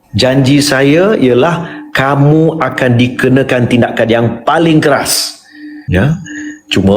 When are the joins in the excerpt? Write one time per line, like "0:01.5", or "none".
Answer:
0:05.7